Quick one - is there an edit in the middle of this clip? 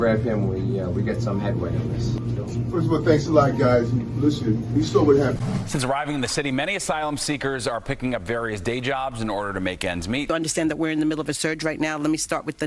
yes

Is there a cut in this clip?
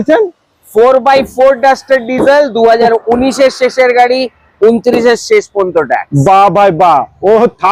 no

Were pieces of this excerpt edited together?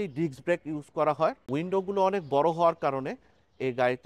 yes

